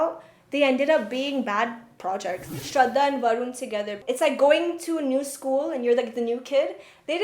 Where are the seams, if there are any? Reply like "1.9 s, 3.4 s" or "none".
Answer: 2.5 s, 4.1 s